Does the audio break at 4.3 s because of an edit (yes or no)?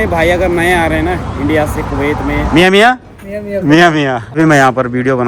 yes